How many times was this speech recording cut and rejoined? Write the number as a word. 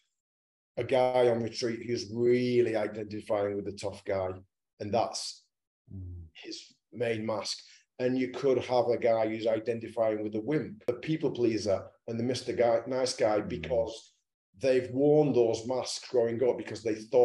one